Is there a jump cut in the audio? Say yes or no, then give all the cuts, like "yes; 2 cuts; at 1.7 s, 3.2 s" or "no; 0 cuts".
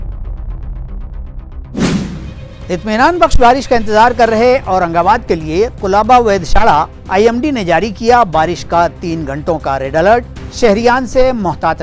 yes; 1 cut; at 2.5 s